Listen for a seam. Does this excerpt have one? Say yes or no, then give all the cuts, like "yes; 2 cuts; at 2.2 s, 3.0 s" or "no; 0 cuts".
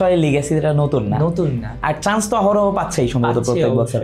no; 0 cuts